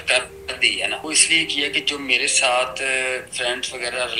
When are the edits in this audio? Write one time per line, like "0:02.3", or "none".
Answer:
0:01.0